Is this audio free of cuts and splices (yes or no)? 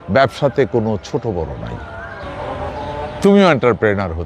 no